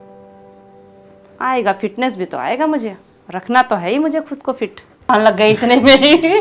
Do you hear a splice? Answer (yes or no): yes